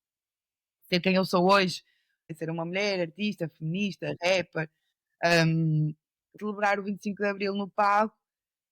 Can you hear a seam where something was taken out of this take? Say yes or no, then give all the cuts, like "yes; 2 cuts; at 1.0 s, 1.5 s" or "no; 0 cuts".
yes; 2 cuts; at 2.3 s, 6.3 s